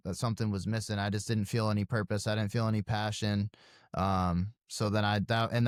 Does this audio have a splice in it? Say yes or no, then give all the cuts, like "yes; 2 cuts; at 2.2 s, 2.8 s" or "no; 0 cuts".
no; 0 cuts